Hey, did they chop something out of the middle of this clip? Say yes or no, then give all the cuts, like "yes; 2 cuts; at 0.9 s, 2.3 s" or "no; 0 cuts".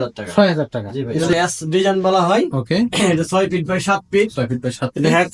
yes; 1 cut; at 1.2 s